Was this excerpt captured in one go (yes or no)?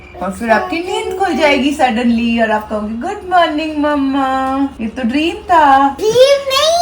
no